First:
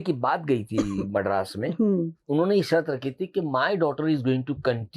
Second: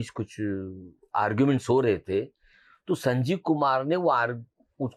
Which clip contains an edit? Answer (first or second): first